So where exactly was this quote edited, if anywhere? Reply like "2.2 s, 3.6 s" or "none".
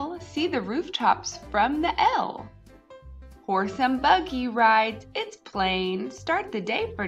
5.7 s

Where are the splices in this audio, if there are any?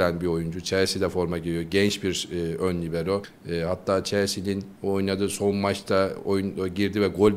none

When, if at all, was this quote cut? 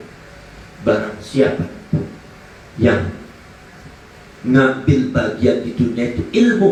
none

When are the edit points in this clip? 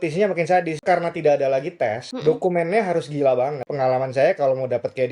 0.8 s, 2.1 s, 3.7 s

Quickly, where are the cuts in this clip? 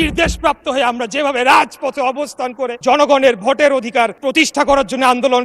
2.8 s, 4.2 s

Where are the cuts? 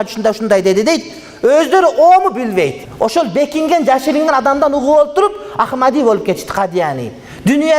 2.8 s

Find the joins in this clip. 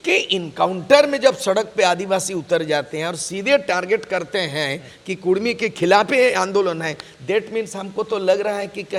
none

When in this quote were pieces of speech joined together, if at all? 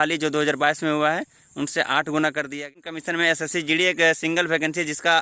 2.6 s

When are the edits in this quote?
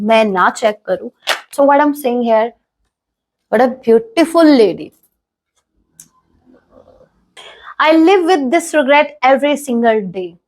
1.5 s, 7.3 s

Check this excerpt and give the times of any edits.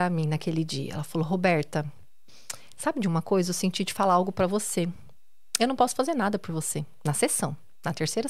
none

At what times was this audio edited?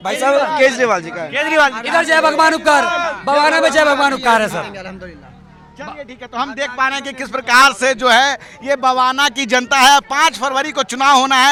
none

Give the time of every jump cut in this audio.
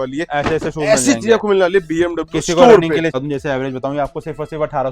3.2 s

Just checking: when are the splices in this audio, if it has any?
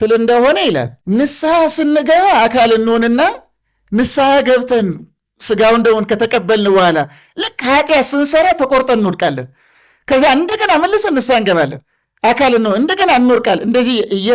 0.9 s

